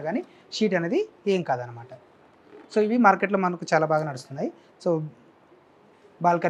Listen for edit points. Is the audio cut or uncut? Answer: uncut